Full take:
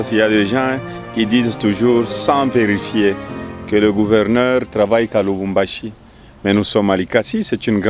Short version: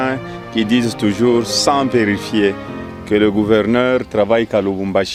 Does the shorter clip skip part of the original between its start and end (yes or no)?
no